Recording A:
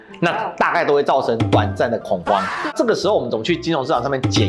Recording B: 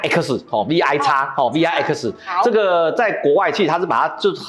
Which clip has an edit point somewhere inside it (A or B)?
A